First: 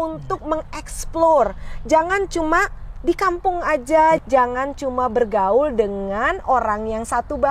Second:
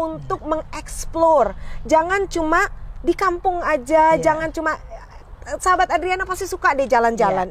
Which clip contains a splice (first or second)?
first